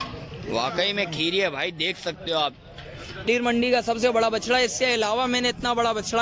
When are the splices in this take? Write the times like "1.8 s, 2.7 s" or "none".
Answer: 3.3 s